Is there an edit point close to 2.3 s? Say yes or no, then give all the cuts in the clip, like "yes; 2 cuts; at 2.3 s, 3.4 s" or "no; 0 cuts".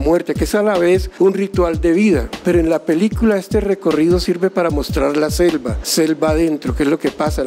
yes; 3 cuts; at 1.1 s, 2.3 s, 5.8 s